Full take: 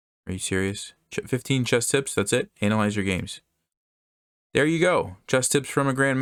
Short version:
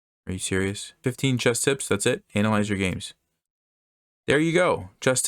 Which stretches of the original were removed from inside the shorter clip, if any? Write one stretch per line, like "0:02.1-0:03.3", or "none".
0:01.0-0:01.3